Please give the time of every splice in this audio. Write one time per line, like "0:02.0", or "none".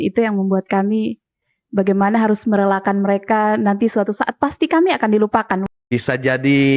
0:05.6

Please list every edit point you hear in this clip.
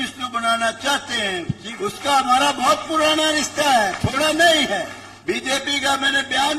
0:01.7
0:05.0

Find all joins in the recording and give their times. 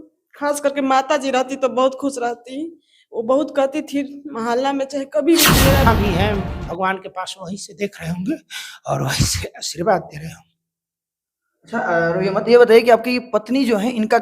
0:05.9

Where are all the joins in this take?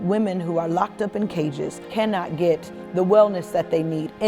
0:01.9

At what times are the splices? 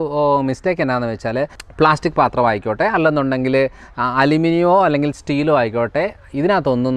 0:01.6

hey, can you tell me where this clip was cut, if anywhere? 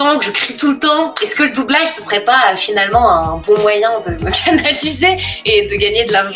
none

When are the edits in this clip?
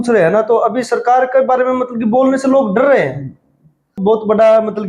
0:04.0

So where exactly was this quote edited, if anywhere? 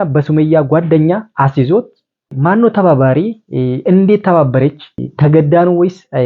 0:04.9

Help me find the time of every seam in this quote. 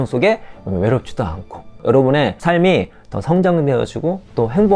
0:01.8
0:02.4

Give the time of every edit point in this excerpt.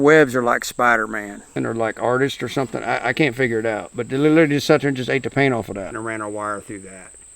0:01.6
0:05.9

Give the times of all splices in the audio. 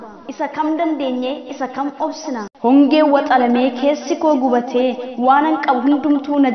0:02.4

